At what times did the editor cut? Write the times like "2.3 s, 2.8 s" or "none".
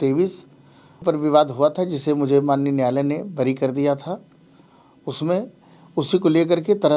1.0 s